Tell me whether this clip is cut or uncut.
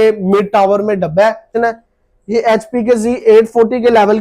cut